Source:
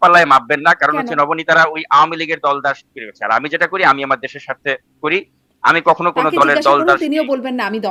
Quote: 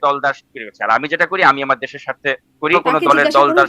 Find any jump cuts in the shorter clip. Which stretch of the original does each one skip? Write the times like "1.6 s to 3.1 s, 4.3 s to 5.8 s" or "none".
5.2 s to 6.1 s

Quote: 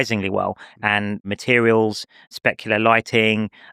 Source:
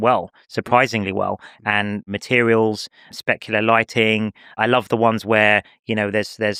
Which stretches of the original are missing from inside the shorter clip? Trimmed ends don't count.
none

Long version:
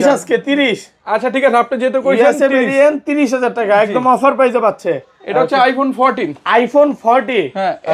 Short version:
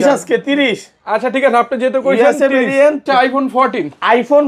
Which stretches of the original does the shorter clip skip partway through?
3.1 s to 5.5 s

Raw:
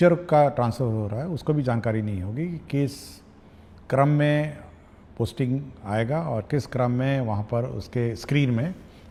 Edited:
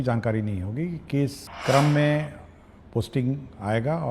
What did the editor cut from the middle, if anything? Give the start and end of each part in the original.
3.1 s to 3.7 s

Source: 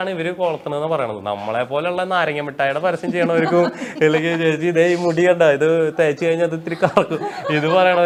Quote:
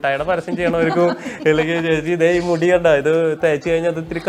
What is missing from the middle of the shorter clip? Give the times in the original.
none

